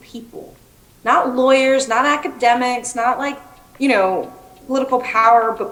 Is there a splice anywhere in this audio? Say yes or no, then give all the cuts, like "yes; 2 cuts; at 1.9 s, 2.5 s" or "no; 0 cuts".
no; 0 cuts